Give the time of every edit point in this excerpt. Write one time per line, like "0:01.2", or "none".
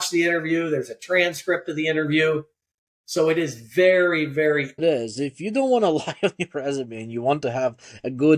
0:04.8